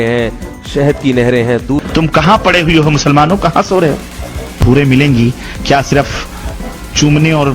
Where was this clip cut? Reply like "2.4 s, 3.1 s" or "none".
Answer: 1.9 s, 4.6 s